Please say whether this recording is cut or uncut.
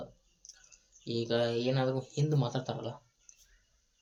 uncut